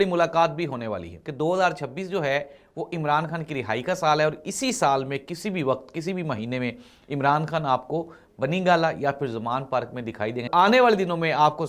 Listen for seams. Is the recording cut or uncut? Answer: cut